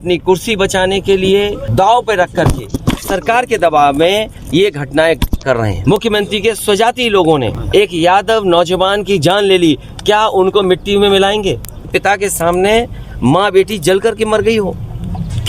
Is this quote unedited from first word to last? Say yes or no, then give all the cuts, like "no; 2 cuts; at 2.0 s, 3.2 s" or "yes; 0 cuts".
no; 4 cuts; at 1.6 s, 5.7 s, 7.6 s, 11.9 s